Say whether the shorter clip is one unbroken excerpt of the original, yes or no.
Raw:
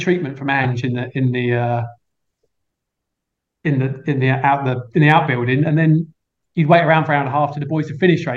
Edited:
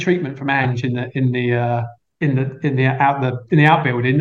no